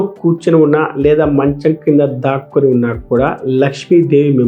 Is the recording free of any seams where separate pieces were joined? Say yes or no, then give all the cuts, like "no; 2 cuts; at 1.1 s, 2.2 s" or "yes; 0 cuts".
yes; 0 cuts